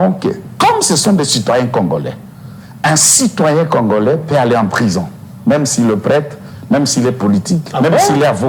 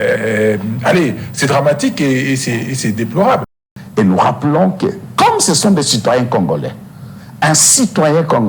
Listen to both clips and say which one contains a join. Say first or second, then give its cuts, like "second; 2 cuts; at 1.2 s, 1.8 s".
second; 1 cut; at 3.5 s